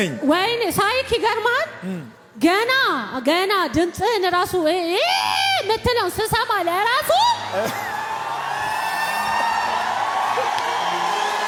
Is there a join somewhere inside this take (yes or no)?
no